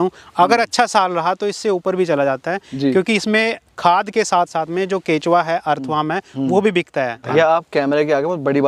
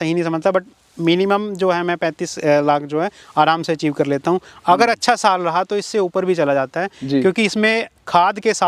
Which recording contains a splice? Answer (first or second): first